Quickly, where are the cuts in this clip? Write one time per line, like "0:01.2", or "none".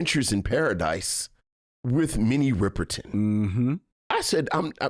0:03.9